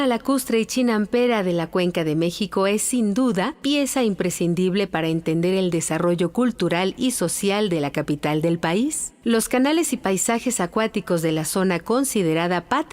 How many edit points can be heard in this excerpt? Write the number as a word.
one